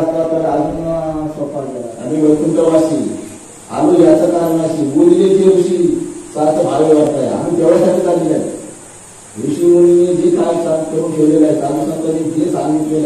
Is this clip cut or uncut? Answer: cut